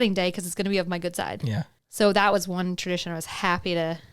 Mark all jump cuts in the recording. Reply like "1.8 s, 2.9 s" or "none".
none